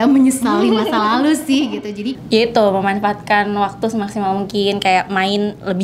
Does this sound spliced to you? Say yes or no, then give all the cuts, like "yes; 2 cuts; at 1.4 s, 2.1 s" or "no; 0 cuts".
yes; 1 cut; at 2.2 s